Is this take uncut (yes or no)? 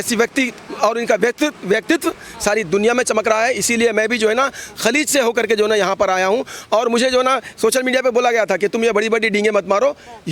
yes